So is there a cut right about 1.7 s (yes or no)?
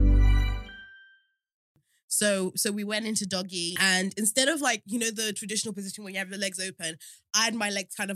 yes